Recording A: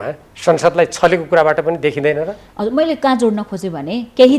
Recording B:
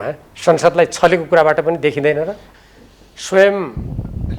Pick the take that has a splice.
B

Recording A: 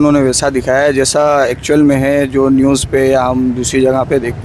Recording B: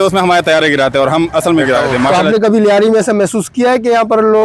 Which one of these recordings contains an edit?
B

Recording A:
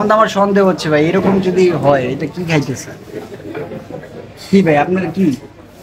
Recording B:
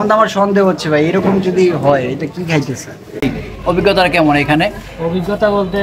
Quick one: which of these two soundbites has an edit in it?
B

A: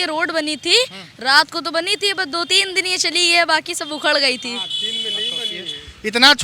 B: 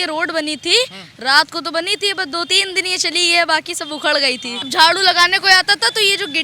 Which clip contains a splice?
B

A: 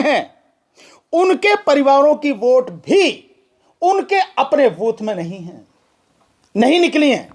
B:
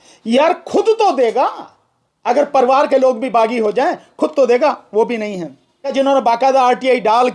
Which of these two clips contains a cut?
B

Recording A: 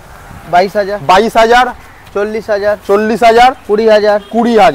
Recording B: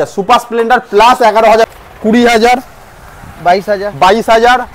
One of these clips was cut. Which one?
B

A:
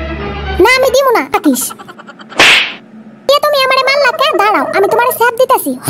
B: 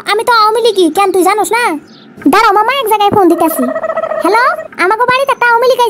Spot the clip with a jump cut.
A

